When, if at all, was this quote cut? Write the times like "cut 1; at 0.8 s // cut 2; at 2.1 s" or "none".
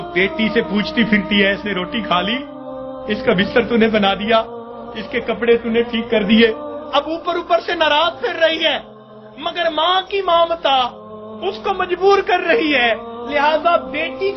none